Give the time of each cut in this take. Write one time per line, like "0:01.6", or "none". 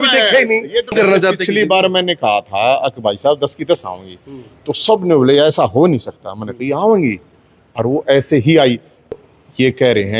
0:00.9
0:09.1